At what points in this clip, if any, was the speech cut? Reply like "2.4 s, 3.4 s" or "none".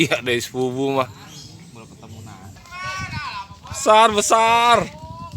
2.6 s

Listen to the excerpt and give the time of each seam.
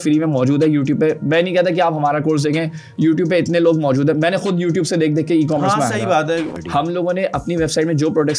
6.5 s

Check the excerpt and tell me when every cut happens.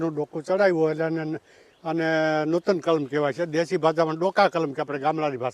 none

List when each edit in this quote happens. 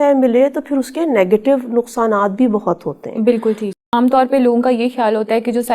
3.8 s

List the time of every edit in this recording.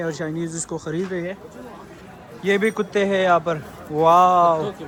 none

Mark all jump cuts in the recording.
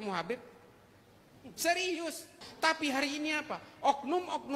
2.5 s

